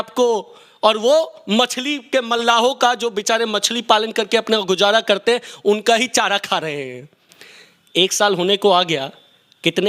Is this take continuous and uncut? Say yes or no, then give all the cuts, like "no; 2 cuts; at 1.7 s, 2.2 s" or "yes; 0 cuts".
yes; 0 cuts